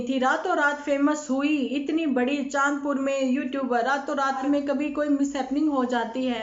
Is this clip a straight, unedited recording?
no; 1 cut; at 4.4 s

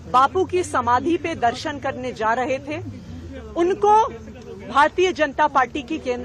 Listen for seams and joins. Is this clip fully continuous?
yes; 0 cuts

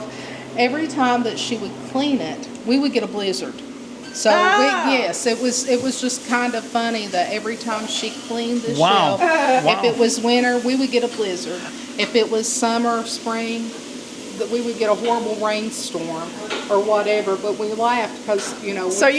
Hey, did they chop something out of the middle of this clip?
no; 0 cuts

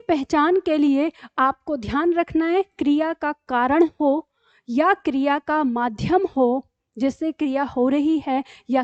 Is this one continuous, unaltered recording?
yes; 0 cuts

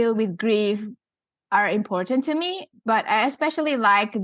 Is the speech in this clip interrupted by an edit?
no; 0 cuts

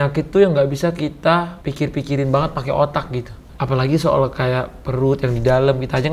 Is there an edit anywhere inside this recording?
no; 0 cuts

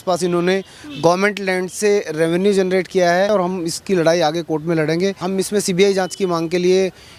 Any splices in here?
yes; 2 cuts; at 3.3 s, 5.2 s

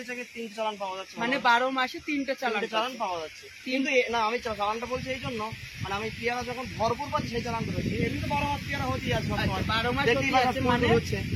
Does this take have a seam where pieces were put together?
no; 0 cuts

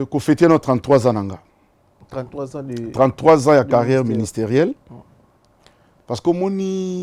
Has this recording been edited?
no; 0 cuts

